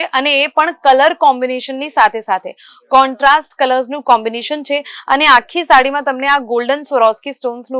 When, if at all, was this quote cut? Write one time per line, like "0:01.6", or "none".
none